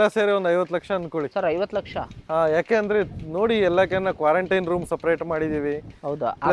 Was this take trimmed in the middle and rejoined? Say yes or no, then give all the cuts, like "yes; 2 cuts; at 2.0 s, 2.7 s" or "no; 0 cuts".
yes; 1 cut; at 1.3 s